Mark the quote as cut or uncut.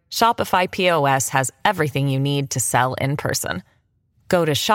uncut